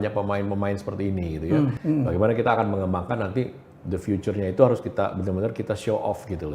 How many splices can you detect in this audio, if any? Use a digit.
1